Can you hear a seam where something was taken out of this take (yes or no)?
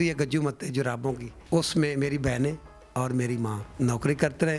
yes